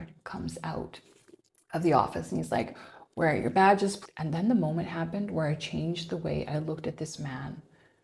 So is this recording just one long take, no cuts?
yes; 0 cuts

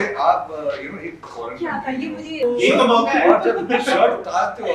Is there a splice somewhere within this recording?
yes; 1 cut; at 2.4 s

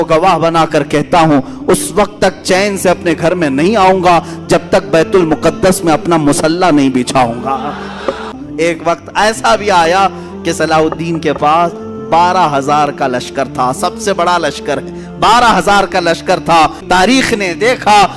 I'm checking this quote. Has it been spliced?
yes; 2 cuts; at 8.4 s, 16.8 s

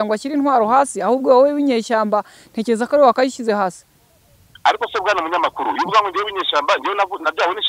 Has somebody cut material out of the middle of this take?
no; 0 cuts

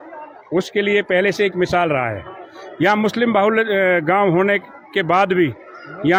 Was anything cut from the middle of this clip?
no; 0 cuts

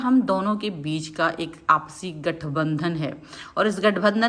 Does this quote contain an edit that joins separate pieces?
no; 0 cuts

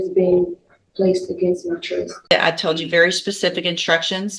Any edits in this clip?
yes; 1 cut; at 2.3 s

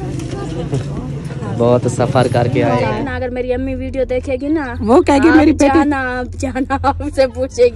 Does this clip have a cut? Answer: yes; 1 cut; at 2.8 s

